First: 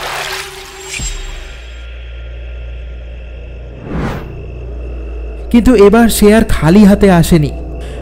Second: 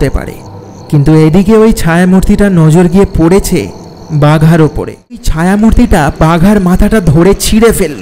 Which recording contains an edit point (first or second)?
second